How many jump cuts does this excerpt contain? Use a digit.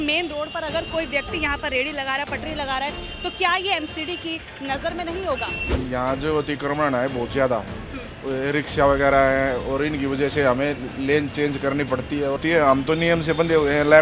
2